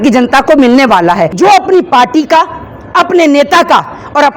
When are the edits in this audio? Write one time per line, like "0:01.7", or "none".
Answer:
0:01.4